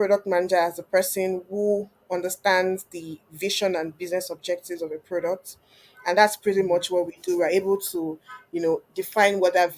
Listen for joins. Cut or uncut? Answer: uncut